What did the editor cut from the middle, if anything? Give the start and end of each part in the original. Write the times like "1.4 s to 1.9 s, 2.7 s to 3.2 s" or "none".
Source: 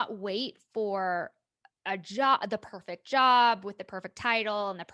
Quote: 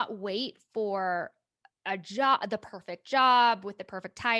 none